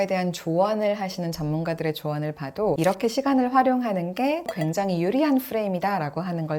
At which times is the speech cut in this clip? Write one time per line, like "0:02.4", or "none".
0:04.5